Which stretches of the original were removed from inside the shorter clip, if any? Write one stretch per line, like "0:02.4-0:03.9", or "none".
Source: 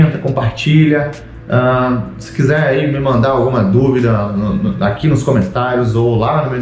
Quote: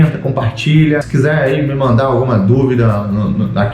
0:01.1-0:02.3